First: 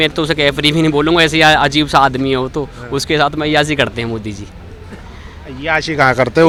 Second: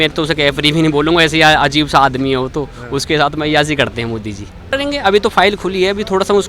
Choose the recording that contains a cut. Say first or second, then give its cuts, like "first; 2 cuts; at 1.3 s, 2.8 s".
second; 1 cut; at 4.7 s